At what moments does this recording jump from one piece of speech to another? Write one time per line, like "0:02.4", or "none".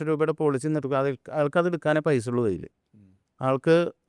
none